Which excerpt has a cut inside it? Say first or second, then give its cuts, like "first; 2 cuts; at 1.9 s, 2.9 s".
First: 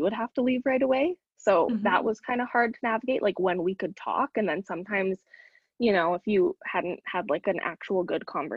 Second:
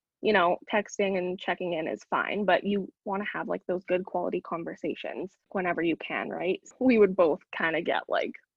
second; 2 cuts; at 5.5 s, 6.6 s